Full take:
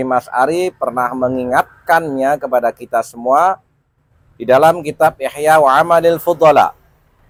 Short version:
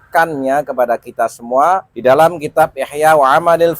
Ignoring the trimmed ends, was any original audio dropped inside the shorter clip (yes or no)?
yes